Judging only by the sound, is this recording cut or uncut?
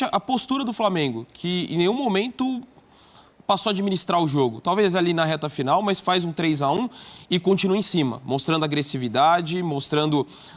uncut